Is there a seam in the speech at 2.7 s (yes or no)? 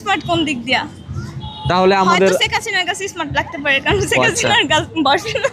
no